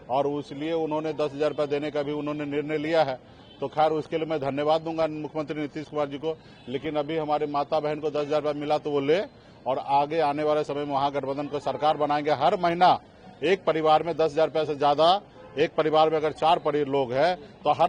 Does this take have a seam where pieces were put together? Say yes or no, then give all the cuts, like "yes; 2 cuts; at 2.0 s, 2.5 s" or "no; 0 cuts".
no; 0 cuts